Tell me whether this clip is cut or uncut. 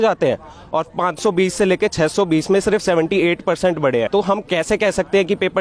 cut